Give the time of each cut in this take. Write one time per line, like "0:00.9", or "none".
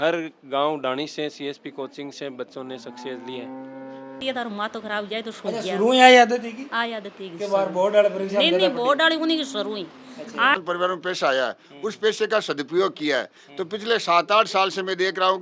0:04.2
0:10.5